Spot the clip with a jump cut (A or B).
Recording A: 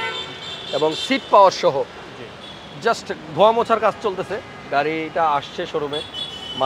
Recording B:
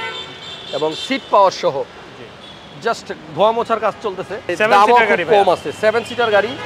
B